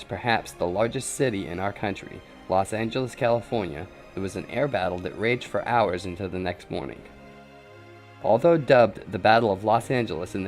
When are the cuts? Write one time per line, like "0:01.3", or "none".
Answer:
0:02.8